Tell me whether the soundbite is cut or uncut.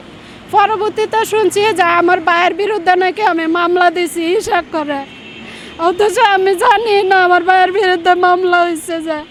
uncut